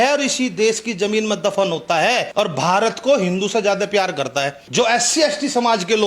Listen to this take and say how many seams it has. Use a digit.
2